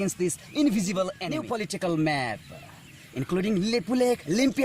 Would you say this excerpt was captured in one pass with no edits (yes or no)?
no